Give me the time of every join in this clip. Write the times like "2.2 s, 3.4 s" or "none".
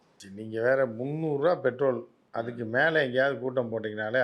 2.6 s